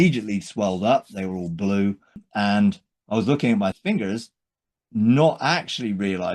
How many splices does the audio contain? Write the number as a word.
two